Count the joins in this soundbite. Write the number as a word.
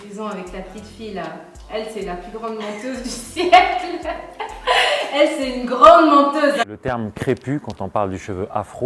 two